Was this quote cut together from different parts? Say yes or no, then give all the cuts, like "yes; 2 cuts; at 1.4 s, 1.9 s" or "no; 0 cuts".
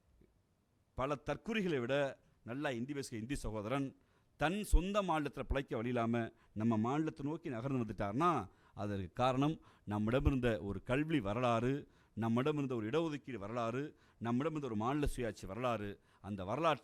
no; 0 cuts